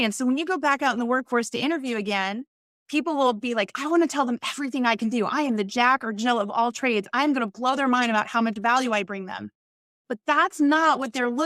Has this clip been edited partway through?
no; 0 cuts

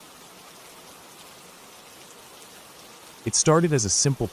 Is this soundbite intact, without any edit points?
no; 1 cut; at 3.2 s

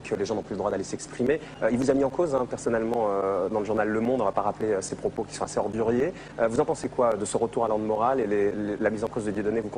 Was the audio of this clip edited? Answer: no; 0 cuts

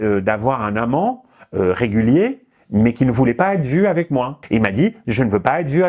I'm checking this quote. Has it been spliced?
yes; 1 cut; at 4.4 s

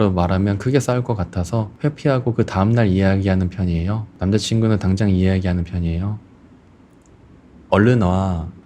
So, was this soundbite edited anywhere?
yes; 1 cut; at 7.7 s

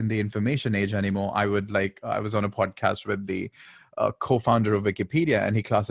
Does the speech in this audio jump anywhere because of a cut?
no; 0 cuts

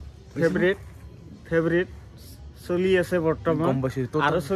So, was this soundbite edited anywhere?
no; 0 cuts

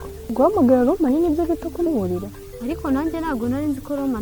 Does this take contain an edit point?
no; 0 cuts

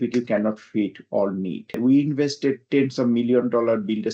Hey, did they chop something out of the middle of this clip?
yes; 1 cut; at 1.8 s

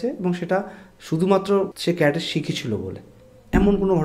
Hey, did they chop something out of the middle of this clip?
yes; 1 cut; at 1.8 s

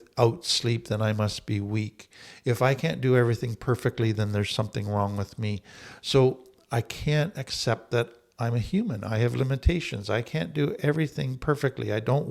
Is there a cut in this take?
no; 0 cuts

